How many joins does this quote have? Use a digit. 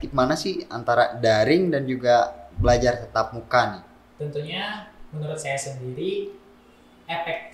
0